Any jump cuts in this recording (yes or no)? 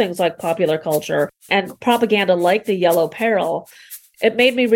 yes